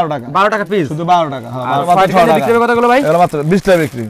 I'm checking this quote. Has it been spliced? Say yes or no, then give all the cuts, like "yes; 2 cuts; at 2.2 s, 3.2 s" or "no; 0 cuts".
yes; 1 cut; at 1.8 s